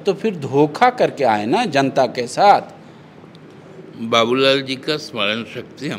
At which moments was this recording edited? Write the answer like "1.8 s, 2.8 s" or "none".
none